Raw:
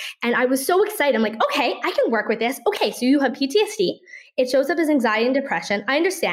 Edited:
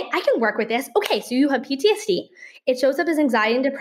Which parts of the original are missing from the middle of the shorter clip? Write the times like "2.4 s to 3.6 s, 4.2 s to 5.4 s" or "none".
none